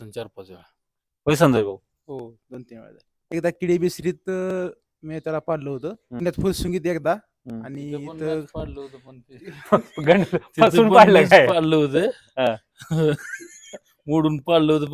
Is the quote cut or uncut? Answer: cut